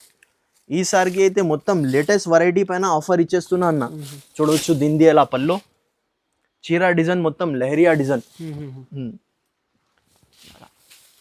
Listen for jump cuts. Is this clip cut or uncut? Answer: uncut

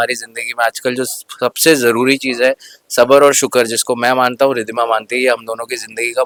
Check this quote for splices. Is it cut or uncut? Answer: uncut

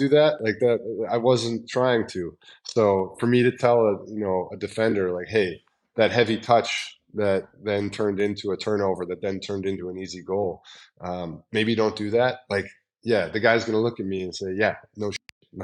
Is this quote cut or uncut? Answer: uncut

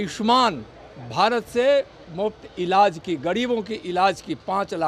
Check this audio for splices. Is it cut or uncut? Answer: uncut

